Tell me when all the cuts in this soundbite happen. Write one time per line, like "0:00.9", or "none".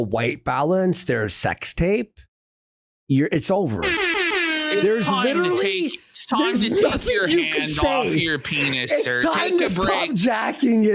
none